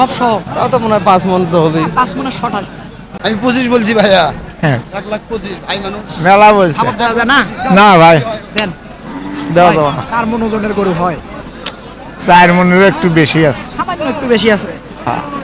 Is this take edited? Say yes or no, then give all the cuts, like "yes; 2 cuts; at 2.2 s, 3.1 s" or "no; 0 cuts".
yes; 1 cut; at 3.1 s